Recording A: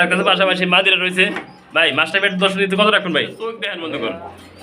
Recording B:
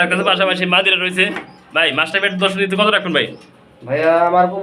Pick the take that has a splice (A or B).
A